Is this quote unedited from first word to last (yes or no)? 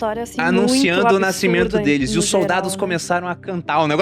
yes